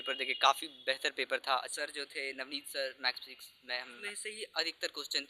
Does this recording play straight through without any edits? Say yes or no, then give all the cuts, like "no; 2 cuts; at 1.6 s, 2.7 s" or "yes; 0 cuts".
no; 2 cuts; at 1.7 s, 3.9 s